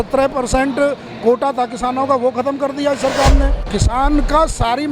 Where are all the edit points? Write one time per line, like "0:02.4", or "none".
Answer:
0:03.6

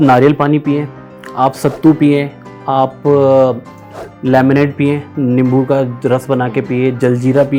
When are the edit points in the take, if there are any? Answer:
none

